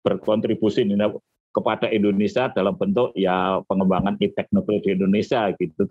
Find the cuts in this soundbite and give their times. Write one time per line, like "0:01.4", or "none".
none